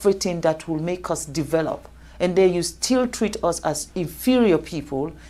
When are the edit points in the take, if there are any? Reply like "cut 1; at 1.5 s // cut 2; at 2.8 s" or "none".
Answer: none